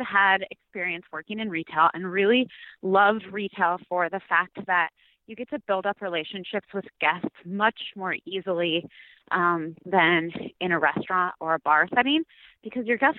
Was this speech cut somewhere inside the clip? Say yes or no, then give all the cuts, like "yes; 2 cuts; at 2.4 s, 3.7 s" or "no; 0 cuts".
no; 0 cuts